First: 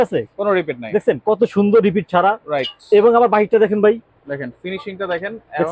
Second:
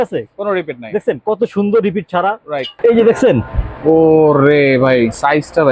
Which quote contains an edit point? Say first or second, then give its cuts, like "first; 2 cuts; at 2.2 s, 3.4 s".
second; 1 cut; at 2.7 s